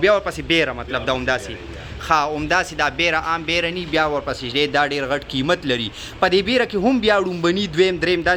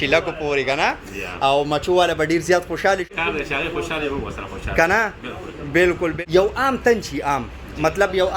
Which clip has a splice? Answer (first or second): second